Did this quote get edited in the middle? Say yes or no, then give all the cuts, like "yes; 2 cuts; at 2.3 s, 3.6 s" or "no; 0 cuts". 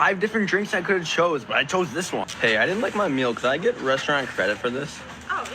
yes; 1 cut; at 2.3 s